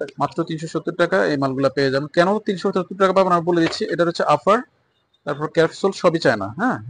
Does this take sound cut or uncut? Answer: uncut